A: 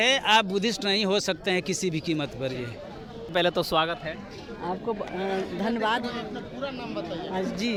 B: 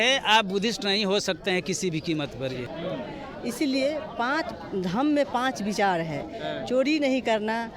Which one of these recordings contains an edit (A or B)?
B